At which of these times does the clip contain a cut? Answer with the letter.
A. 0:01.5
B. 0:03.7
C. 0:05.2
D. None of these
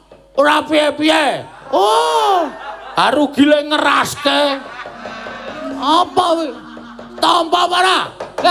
A